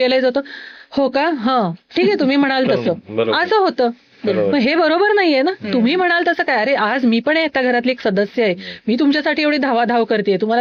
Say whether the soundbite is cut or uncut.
uncut